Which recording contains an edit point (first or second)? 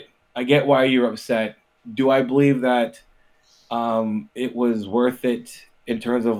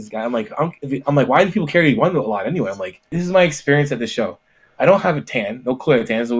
second